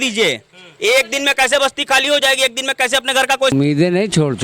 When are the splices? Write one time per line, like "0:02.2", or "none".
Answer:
0:03.5